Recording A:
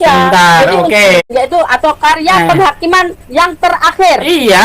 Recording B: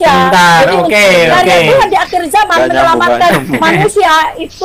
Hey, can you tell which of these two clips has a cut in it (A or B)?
A